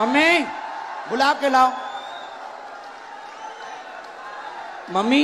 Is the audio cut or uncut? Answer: uncut